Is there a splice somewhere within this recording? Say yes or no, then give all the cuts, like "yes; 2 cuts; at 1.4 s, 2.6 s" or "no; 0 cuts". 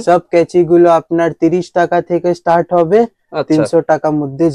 no; 0 cuts